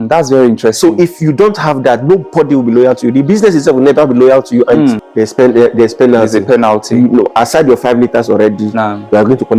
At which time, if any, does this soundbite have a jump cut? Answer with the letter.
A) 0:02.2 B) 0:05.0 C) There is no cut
B